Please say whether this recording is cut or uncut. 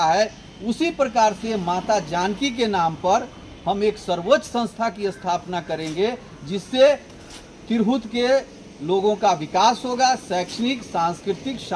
uncut